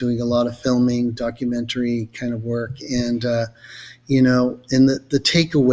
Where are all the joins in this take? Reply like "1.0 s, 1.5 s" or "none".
none